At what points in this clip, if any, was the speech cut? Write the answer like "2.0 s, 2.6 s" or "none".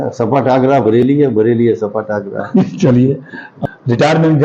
3.5 s